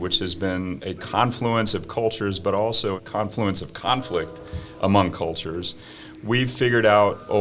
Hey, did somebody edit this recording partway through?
yes; 2 cuts; at 0.8 s, 3.0 s

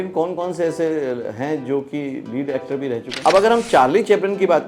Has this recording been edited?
yes; 1 cut; at 3.1 s

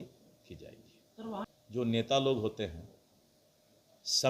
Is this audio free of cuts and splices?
no; 1 cut; at 1.5 s

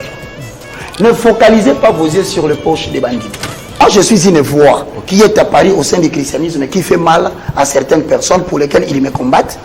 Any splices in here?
yes; 1 cut; at 3.8 s

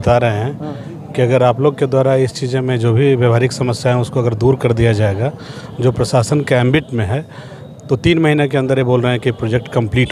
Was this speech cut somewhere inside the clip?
no; 0 cuts

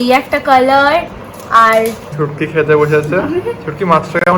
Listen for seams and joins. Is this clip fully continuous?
no; 1 cut; at 2.0 s

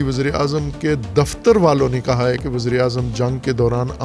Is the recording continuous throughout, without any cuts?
yes; 0 cuts

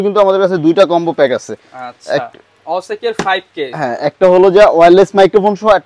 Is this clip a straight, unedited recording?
yes; 0 cuts

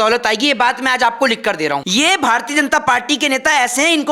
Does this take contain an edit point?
yes; 1 cut; at 1.8 s

